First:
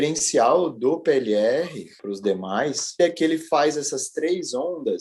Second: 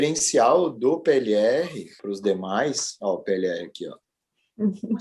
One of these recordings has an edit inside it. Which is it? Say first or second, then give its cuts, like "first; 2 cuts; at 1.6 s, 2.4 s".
first; 1 cut; at 3.0 s